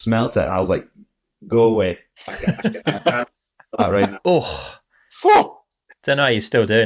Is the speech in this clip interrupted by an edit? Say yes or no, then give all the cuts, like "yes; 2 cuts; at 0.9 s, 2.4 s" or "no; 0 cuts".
yes; 1 cut; at 4.2 s